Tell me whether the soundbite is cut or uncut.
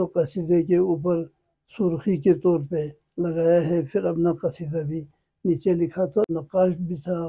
cut